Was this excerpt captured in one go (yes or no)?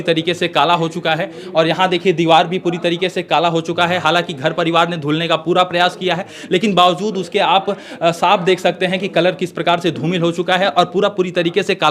yes